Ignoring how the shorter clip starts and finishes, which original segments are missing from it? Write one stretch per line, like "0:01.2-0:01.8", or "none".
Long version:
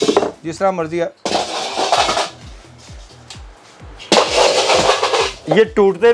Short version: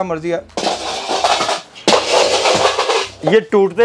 0:02.4-0:03.9